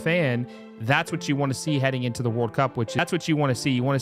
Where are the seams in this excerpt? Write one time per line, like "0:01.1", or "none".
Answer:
0:03.0